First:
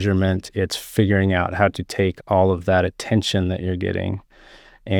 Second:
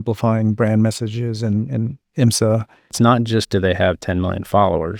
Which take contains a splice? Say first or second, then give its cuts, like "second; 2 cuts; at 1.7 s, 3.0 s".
second; 1 cut; at 2.9 s